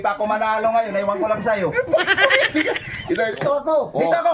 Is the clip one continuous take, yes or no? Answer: no